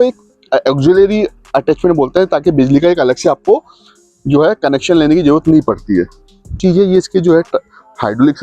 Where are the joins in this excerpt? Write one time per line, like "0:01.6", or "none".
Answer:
0:06.1